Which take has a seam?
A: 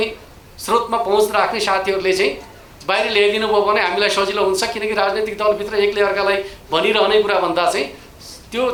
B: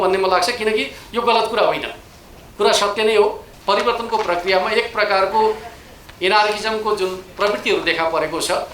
B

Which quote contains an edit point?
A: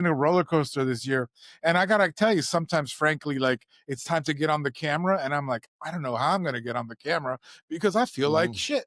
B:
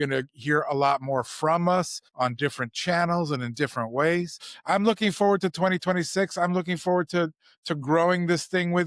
B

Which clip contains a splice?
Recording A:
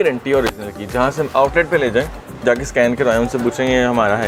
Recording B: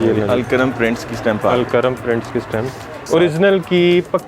B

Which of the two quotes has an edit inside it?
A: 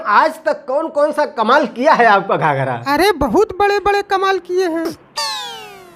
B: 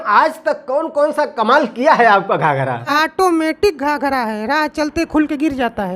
B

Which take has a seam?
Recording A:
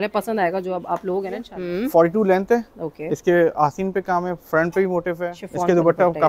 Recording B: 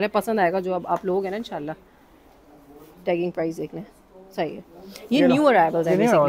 A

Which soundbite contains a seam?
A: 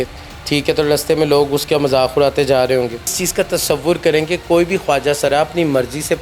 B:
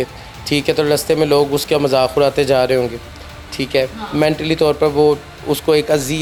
A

